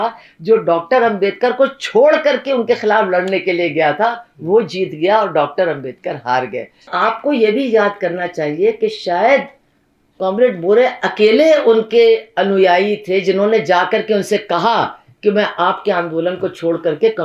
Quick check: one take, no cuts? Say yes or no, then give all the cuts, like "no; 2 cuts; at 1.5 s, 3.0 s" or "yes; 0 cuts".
no; 1 cut; at 6.9 s